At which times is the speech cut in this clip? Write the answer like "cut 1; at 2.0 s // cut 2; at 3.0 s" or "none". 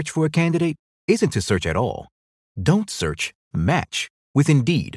none